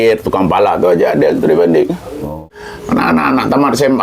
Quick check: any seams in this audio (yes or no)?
yes